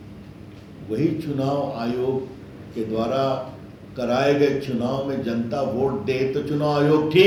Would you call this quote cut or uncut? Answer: uncut